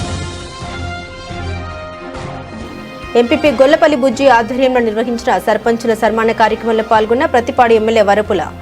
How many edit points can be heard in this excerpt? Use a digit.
1